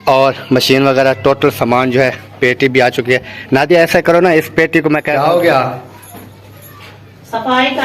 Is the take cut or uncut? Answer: cut